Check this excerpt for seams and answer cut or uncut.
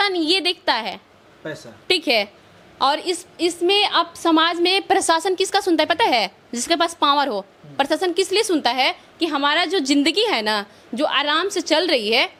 uncut